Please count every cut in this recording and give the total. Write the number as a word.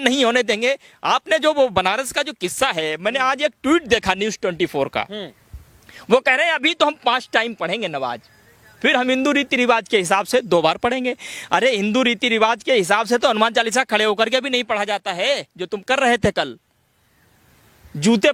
zero